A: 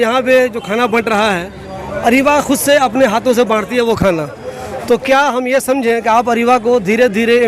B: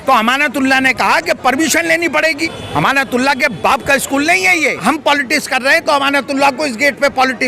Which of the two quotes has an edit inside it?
B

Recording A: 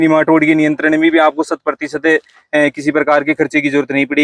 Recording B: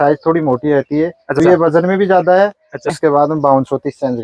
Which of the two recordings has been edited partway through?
B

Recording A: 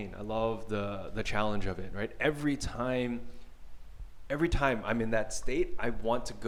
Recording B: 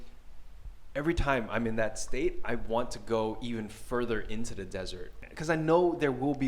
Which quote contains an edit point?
B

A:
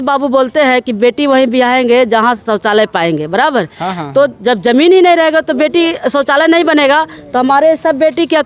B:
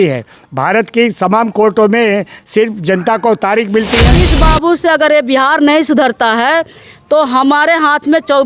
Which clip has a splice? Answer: B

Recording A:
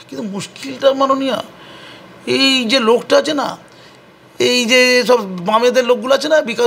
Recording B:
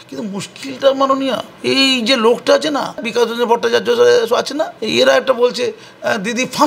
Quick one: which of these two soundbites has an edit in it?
B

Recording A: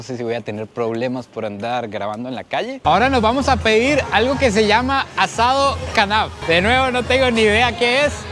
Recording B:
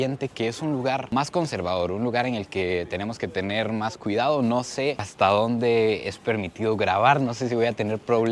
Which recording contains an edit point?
A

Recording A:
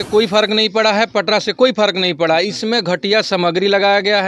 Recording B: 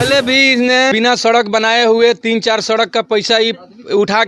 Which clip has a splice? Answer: B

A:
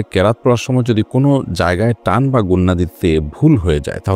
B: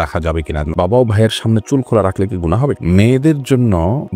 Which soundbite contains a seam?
B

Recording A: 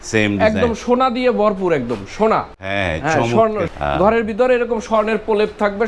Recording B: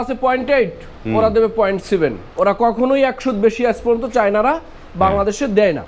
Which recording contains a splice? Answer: A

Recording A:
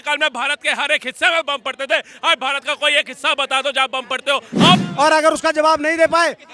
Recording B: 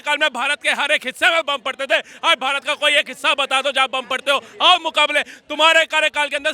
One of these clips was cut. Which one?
A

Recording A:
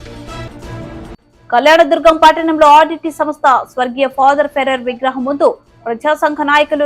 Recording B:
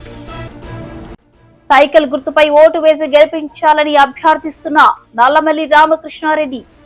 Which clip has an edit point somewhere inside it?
A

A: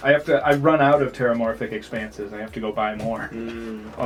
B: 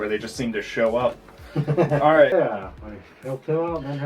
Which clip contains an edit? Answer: B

